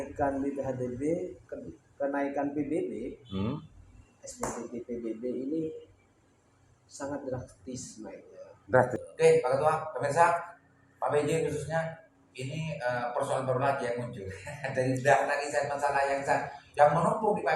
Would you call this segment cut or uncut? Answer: cut